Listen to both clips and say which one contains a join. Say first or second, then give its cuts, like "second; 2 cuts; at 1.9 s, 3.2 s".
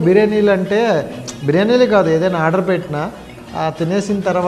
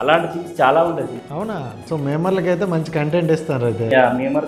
second; 1 cut; at 1.7 s